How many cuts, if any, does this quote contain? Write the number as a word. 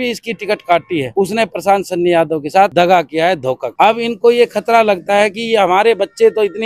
three